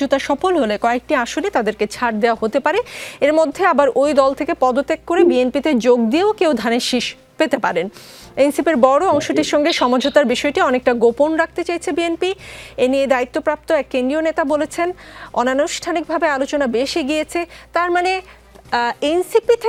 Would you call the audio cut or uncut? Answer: uncut